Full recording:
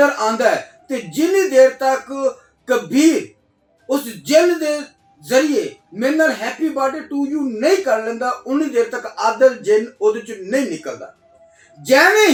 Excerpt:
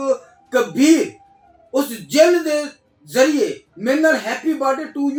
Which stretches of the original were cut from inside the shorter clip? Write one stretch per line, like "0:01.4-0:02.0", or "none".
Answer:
none

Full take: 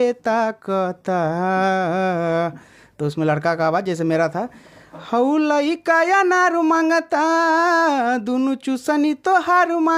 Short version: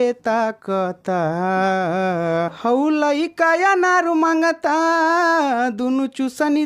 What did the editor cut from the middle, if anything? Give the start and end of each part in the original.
0:02.5-0:05.0

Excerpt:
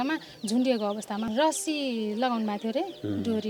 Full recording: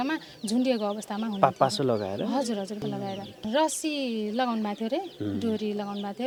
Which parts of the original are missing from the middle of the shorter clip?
0:01.3-0:03.4

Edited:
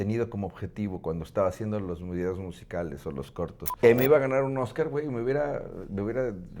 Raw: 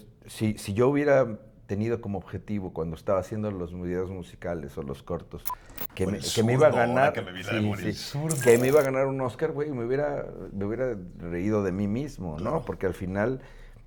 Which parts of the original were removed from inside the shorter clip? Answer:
0:05.4-0:08.4

